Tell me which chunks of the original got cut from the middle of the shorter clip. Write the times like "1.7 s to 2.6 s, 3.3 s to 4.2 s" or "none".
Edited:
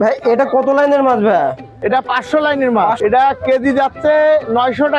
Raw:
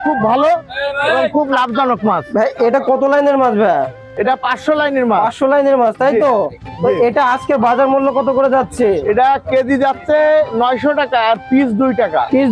5.3 s to 9.0 s